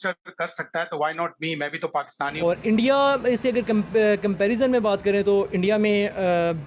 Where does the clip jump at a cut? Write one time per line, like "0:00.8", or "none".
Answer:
0:02.3